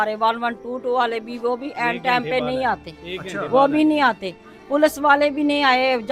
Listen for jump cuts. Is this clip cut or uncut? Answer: uncut